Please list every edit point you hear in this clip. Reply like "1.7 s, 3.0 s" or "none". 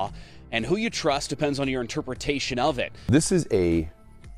3.0 s